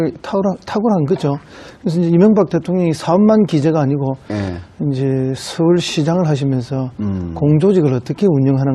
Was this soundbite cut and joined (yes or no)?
no